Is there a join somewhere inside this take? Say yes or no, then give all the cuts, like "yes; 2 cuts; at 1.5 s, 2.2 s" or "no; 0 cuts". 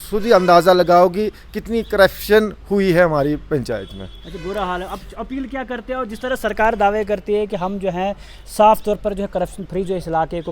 no; 0 cuts